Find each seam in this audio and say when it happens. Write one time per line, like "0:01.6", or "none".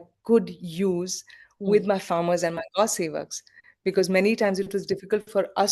none